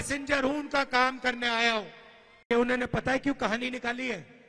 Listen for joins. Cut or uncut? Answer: cut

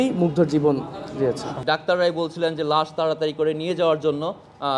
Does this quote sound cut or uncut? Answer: cut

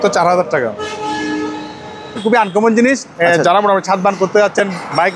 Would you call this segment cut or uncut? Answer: cut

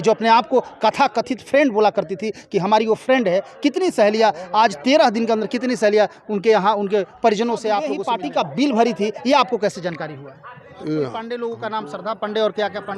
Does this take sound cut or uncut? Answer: cut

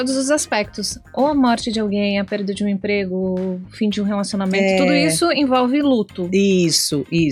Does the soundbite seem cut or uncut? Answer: uncut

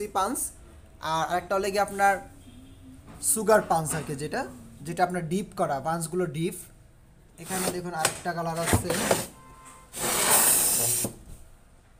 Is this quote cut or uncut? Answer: uncut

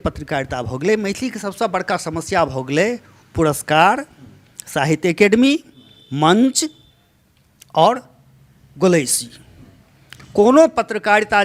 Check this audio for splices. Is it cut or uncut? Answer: uncut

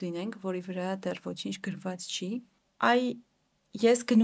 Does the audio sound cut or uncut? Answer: cut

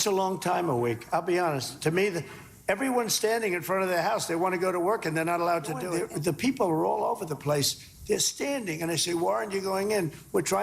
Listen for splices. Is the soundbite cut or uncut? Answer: uncut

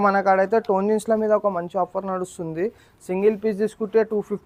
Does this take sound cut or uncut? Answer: uncut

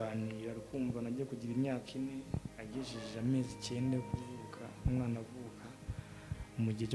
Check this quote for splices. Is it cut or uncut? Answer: uncut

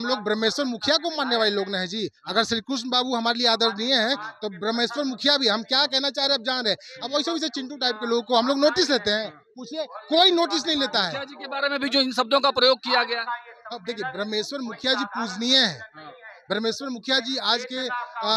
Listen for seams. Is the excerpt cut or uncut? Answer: uncut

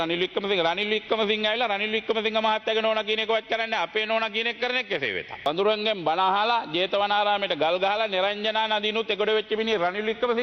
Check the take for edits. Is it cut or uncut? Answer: cut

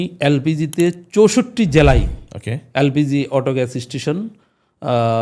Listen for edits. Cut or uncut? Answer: uncut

